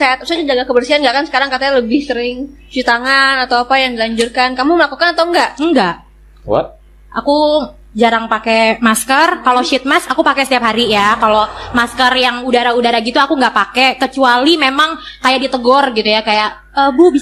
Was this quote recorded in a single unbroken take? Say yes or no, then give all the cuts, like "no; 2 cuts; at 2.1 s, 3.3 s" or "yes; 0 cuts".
yes; 0 cuts